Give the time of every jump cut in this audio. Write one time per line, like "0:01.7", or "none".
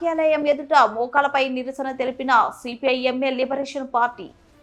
none

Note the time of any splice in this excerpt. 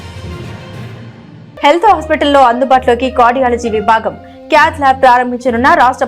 none

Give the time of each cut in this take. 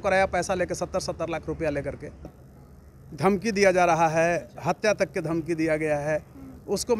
0:02.4

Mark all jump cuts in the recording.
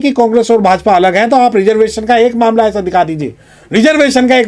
none

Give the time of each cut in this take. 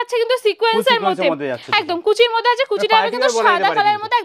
none

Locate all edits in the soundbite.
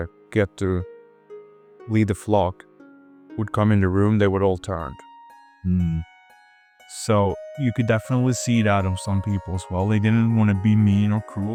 none

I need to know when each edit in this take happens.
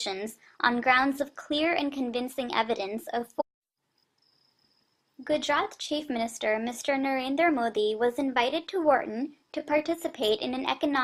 none

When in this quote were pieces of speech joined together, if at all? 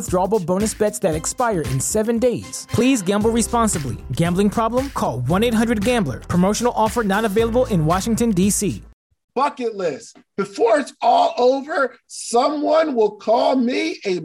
0:08.8

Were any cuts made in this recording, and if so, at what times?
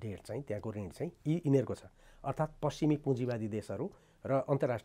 none

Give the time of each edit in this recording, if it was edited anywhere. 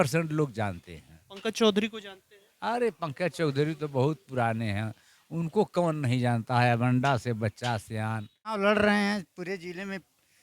0:08.5

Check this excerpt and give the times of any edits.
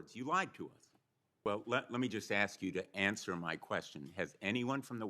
0:01.3

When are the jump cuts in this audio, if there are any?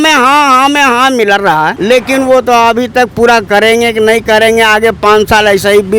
0:01.8

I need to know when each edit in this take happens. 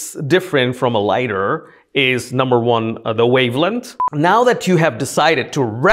0:04.1

